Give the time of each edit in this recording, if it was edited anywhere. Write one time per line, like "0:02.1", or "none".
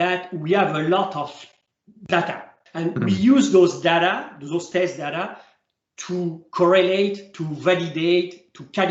0:02.6